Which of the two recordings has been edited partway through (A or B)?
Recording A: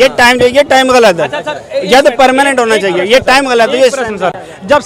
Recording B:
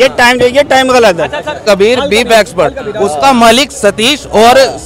B